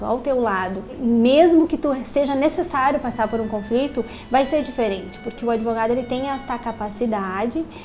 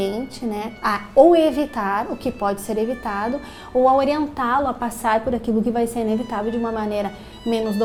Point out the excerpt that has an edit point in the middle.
first; 1 cut; at 1.0 s

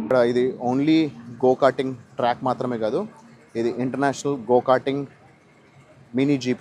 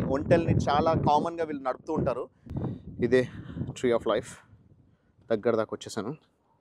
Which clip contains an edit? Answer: second; 1 cut; at 2.4 s

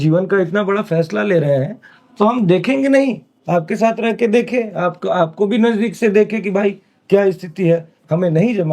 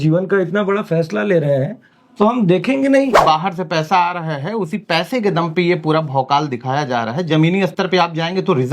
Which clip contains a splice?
second; 1 cut; at 3.2 s

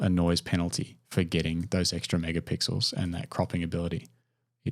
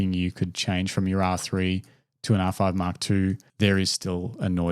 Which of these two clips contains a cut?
second; 1 cut; at 3.5 s

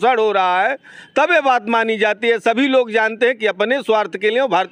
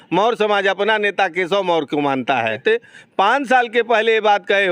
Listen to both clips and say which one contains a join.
second; 1 cut; at 2.6 s

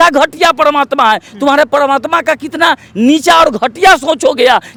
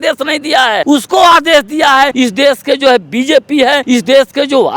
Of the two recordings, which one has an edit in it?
second; 3 cuts; at 0.8 s, 2.1 s, 3.8 s

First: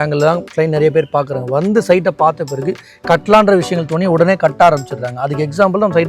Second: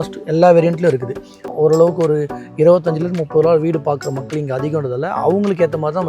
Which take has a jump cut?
second; 1 cut; at 1.4 s

